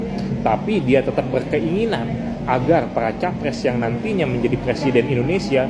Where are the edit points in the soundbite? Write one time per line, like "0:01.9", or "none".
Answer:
none